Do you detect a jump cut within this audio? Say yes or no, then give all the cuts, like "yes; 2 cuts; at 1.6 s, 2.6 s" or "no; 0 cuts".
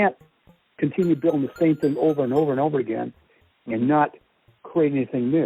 no; 0 cuts